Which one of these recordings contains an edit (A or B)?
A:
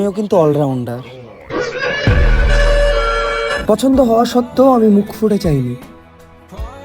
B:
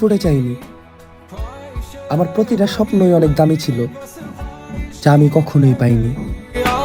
A